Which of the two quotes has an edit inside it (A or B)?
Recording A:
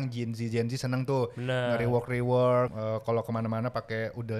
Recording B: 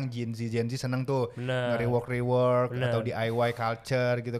A